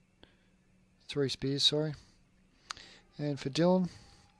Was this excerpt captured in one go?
no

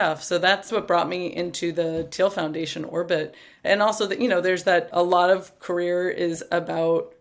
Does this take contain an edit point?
no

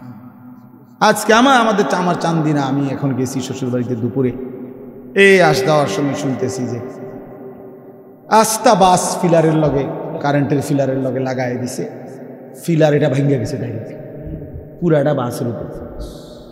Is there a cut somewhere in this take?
no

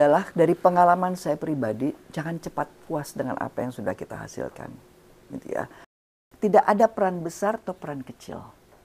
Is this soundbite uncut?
no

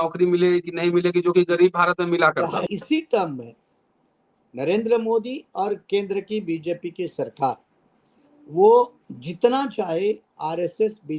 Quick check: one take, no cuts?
no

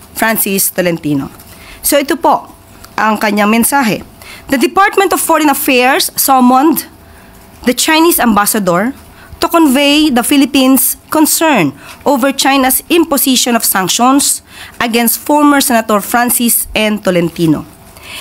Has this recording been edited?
no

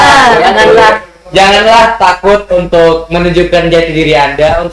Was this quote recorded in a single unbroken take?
yes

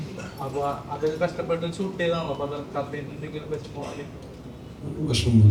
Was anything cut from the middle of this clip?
no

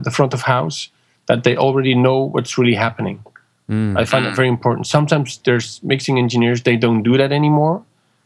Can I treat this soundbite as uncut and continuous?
yes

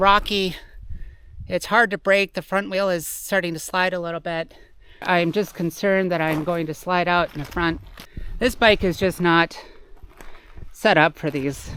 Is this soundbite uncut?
no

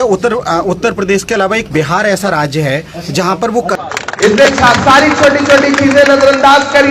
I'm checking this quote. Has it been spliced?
yes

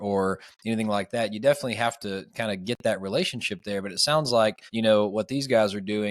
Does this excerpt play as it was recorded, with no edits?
no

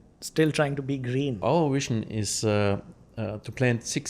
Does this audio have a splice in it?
yes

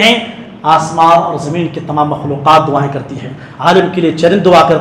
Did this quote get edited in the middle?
no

